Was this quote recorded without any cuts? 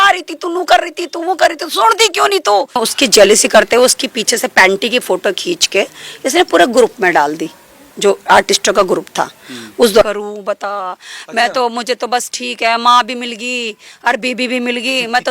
no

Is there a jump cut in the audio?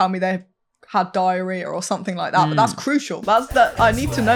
no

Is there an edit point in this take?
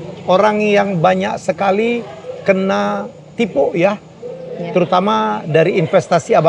no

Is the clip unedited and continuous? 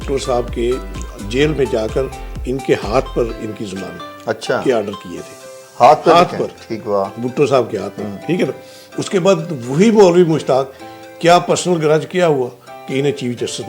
yes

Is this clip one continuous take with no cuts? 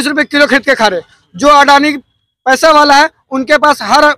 yes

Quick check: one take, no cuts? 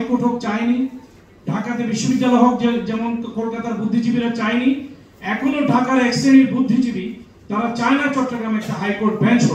yes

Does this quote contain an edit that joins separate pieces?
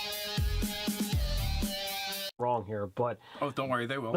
no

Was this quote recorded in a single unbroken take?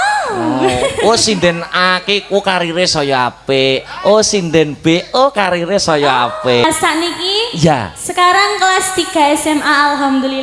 no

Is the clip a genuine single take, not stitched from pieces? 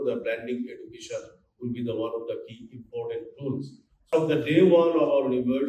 no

